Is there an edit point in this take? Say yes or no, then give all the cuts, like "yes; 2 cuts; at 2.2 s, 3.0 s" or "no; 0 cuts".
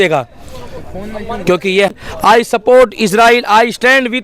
yes; 1 cut; at 2.0 s